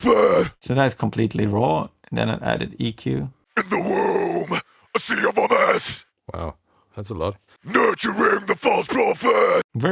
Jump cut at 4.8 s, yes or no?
no